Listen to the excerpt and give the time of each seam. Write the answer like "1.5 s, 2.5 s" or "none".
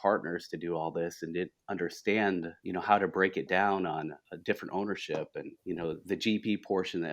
2.6 s, 4.3 s, 5.5 s